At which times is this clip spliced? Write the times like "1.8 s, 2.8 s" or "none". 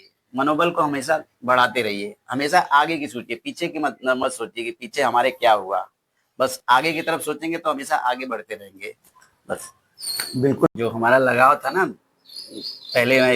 10.7 s